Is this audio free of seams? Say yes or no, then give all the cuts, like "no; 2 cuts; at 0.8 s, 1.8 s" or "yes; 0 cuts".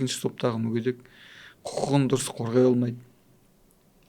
yes; 0 cuts